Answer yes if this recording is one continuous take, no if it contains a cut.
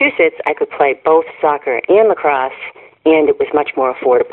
yes